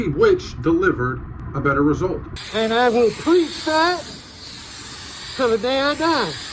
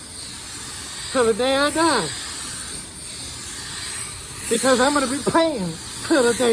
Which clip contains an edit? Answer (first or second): first